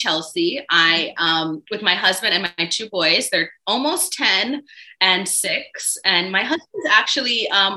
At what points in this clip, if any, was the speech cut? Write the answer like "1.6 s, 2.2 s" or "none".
none